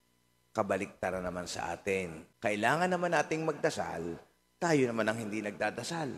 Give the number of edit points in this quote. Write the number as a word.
one